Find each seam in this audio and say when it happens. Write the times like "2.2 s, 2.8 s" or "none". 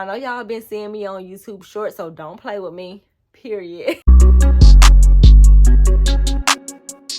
4.0 s